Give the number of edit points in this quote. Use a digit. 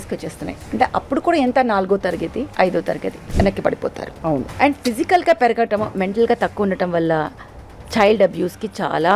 3